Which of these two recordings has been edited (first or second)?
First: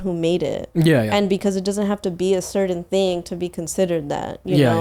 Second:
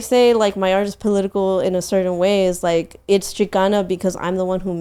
first